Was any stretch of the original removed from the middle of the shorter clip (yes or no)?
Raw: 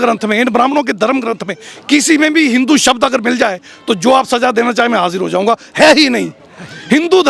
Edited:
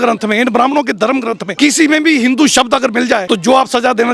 yes